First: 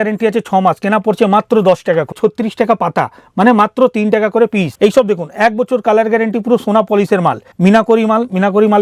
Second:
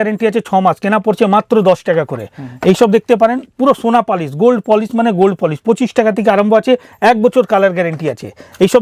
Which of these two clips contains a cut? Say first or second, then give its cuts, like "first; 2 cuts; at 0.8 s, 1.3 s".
first; 3 cuts; at 2.1 s, 4.7 s, 7.5 s